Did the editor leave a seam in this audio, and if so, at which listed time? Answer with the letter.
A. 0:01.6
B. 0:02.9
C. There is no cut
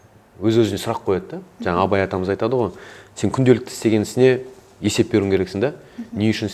C